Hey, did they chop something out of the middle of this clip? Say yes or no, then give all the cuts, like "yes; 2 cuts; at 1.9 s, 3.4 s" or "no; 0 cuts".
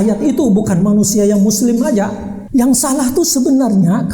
yes; 1 cut; at 2.4 s